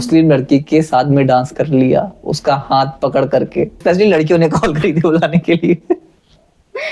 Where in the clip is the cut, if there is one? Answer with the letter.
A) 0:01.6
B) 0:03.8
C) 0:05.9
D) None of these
B